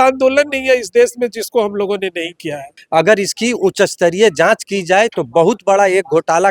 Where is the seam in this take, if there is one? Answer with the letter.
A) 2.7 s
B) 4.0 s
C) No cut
A